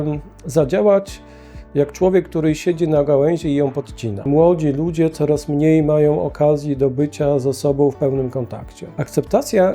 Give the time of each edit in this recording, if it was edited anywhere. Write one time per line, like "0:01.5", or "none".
0:04.2
0:08.8